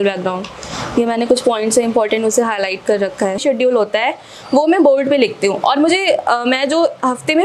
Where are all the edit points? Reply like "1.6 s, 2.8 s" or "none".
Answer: 3.4 s